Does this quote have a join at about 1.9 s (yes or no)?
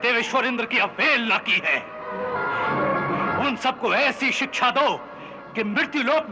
no